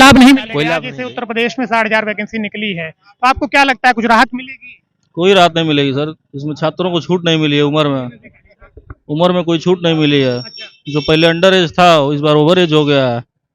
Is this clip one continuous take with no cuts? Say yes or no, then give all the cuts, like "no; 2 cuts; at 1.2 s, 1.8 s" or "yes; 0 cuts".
no; 1 cut; at 0.9 s